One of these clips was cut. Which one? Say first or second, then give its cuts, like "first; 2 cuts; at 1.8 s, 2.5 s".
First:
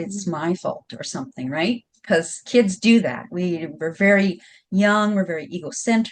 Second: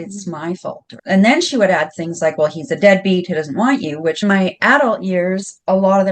second; 2 cuts; at 0.9 s, 4.2 s